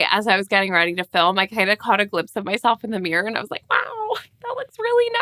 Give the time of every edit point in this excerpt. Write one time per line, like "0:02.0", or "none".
none